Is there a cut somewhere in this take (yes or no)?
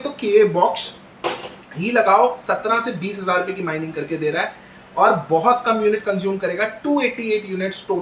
no